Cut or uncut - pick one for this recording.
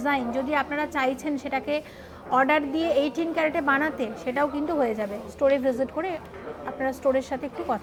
uncut